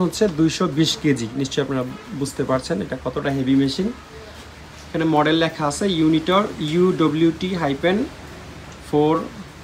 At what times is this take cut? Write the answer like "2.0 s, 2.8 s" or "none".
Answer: none

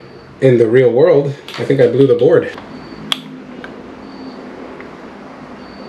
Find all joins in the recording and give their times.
2.5 s

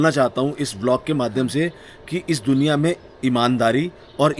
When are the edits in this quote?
none

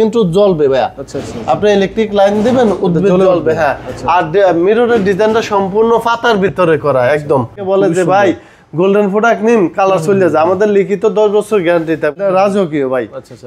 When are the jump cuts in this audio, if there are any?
7.6 s, 12.2 s

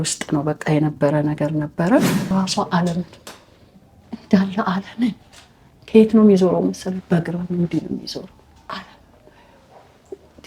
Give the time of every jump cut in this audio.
2.3 s

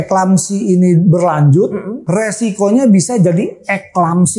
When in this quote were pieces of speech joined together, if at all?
2.0 s

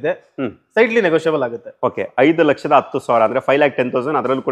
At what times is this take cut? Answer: none

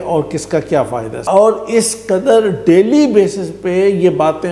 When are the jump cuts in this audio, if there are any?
1.1 s

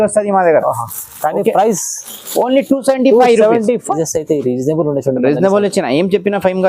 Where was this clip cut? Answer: 3.9 s

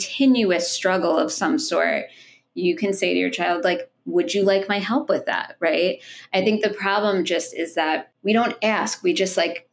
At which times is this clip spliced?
8.1 s

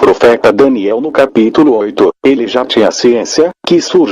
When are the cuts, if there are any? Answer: 3.0 s

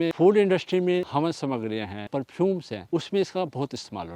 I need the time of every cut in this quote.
1.1 s, 2.1 s, 2.7 s

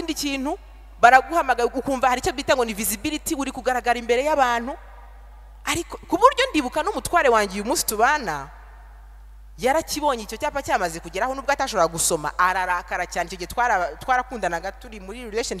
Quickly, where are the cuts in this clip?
none

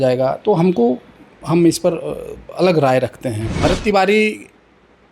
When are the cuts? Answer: 3.5 s

